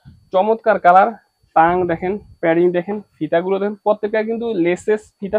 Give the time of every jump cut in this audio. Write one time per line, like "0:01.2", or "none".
none